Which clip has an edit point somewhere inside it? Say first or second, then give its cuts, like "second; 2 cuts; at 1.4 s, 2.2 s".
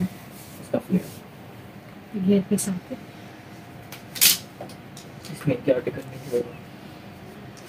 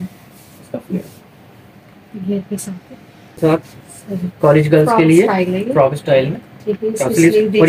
second; 1 cut; at 3.4 s